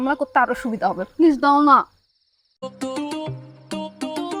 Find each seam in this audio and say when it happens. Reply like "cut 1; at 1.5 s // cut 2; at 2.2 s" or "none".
cut 1; at 2.6 s